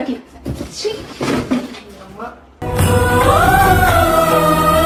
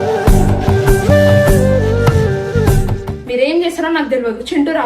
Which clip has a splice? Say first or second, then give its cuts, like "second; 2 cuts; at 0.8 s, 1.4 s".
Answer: second; 1 cut; at 3.0 s